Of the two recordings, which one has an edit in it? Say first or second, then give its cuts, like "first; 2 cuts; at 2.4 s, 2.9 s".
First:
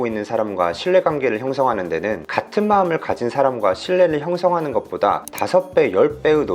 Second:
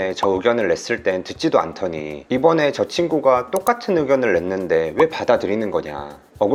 first; 2 cuts; at 2.2 s, 5.3 s